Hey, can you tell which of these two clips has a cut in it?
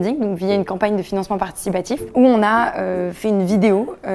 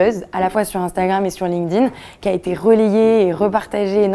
first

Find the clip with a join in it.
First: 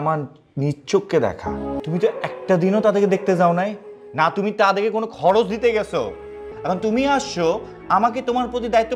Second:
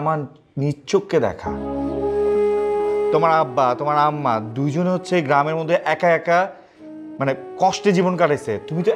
first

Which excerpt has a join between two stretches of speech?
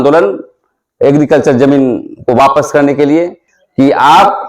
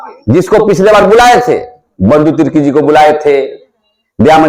first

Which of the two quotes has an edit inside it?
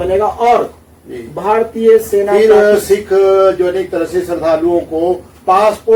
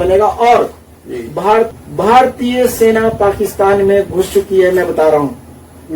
second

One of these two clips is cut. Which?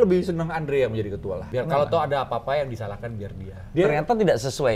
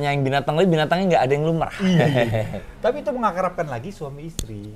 first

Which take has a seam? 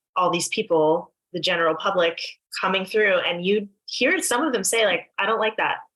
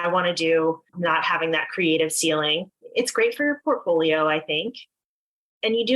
second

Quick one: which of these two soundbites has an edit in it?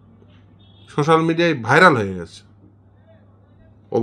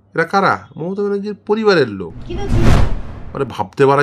second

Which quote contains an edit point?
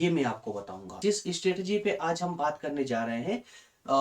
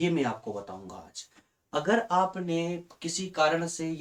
first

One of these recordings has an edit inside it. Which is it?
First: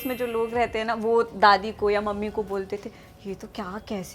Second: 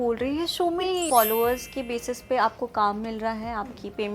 second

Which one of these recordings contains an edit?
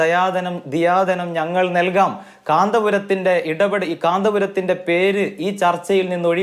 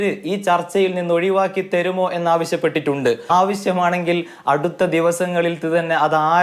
second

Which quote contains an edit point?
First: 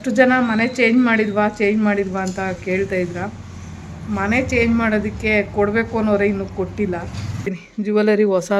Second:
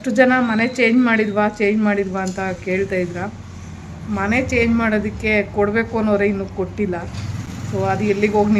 first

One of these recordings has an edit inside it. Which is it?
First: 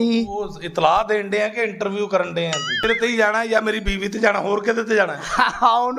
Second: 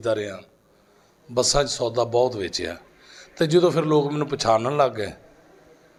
first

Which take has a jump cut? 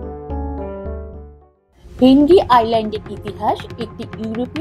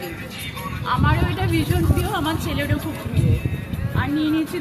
first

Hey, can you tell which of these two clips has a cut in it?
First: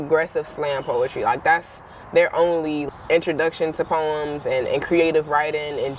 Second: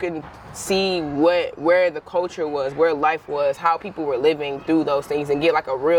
first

